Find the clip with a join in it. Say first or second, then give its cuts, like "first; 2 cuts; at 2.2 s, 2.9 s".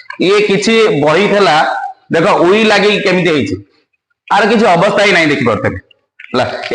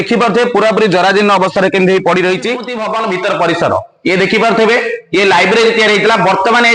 second; 1 cut; at 2.8 s